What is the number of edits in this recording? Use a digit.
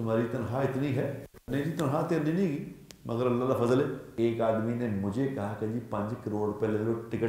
2